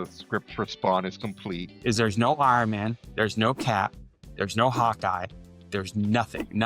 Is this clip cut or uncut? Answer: cut